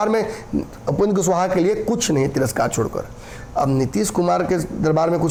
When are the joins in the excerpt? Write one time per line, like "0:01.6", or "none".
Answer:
none